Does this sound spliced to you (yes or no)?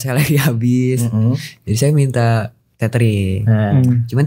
no